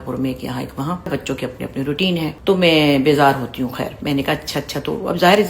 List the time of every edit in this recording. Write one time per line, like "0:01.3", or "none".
0:01.1
0:02.4